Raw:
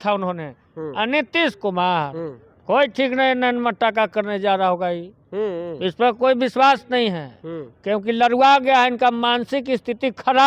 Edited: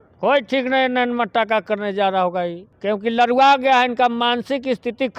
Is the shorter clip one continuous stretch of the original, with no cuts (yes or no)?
no